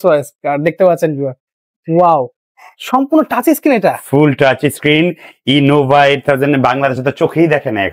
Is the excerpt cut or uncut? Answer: uncut